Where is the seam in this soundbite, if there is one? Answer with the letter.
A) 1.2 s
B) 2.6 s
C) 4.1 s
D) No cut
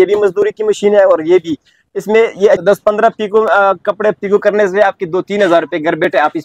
B